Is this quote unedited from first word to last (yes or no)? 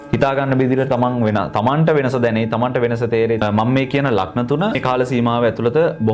no